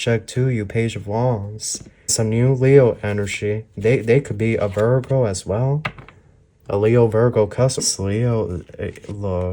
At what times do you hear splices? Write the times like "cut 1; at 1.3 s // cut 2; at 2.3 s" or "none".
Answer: cut 1; at 2.1 s // cut 2; at 7.8 s